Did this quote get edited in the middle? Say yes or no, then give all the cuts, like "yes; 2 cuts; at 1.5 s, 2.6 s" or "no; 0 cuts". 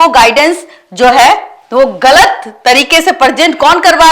no; 0 cuts